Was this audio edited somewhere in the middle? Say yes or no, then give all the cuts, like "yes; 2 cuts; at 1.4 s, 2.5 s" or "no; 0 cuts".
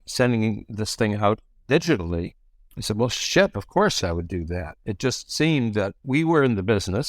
yes; 2 cuts; at 4.0 s, 6.0 s